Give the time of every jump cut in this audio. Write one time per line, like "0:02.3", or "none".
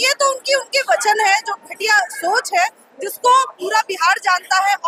none